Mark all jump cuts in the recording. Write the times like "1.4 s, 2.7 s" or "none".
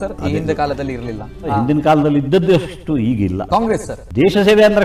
1.5 s, 3.9 s